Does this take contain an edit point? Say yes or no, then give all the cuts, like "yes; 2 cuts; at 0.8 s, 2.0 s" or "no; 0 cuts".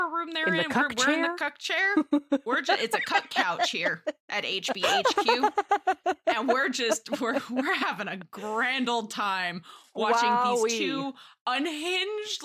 no; 0 cuts